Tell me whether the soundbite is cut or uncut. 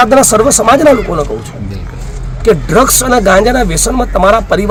uncut